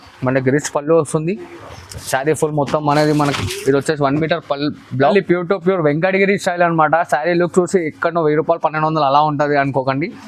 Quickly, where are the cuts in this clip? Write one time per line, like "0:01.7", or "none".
0:05.1